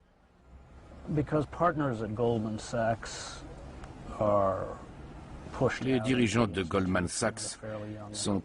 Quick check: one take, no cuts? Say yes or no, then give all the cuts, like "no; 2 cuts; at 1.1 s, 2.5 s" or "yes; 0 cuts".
yes; 0 cuts